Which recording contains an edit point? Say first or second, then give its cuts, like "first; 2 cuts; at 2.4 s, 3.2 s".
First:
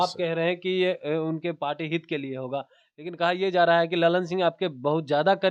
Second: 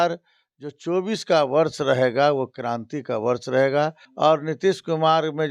second; 1 cut; at 4.0 s